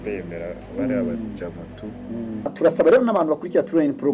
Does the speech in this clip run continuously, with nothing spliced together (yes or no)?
no